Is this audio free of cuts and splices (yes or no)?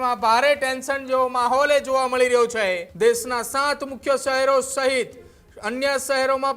no